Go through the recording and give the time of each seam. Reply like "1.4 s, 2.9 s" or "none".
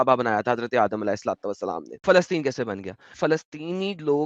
2.0 s, 3.2 s